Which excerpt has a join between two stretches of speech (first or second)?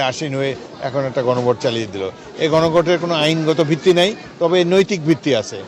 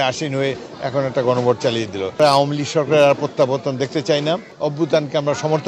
second